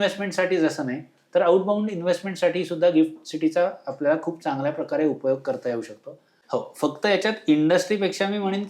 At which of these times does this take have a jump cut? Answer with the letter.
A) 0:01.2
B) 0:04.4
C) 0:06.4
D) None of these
C